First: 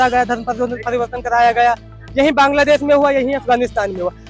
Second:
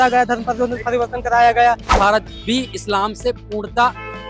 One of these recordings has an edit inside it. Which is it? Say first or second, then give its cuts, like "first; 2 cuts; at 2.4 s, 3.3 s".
second; 1 cut; at 1.9 s